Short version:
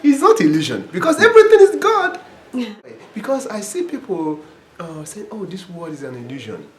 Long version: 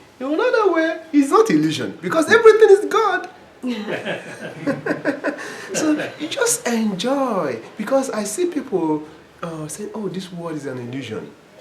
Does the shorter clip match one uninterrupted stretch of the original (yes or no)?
no